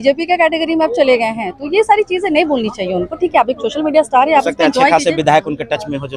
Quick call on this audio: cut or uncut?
uncut